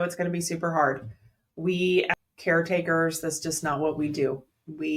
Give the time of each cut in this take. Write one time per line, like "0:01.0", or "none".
0:02.1